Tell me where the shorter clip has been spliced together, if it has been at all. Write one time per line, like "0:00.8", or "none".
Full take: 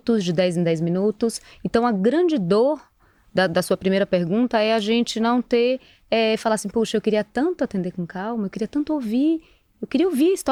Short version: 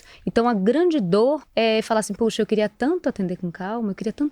0:01.5

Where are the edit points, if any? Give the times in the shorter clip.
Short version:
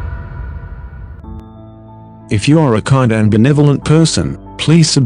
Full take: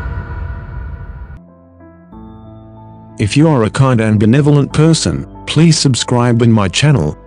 0:01.1

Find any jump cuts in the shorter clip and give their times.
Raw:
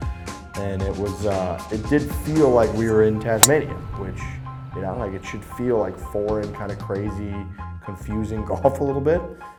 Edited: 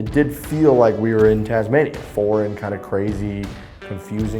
0:02.0

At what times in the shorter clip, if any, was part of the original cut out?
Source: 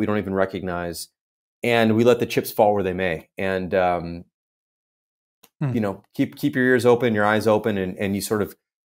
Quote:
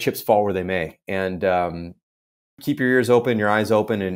0:02.6

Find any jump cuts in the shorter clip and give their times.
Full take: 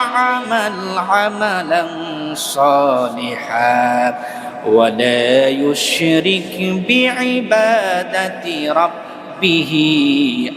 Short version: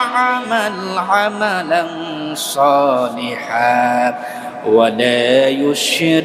none

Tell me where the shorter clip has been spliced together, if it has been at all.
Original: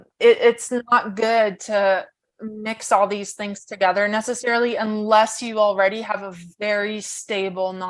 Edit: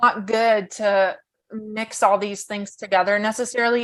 none

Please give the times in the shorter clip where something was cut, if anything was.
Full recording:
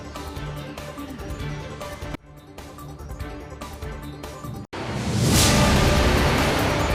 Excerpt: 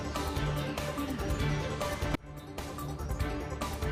none

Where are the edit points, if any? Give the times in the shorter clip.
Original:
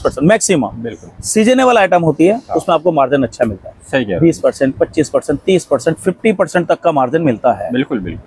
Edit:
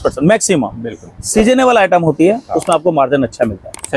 none

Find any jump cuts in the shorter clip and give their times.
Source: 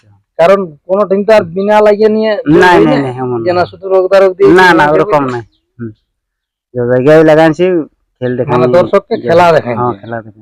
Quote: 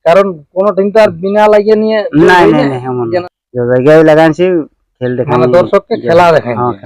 0:03.2

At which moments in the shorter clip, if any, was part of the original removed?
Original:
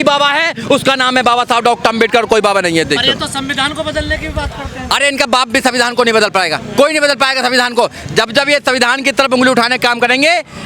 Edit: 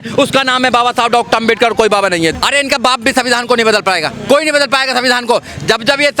0:02.3

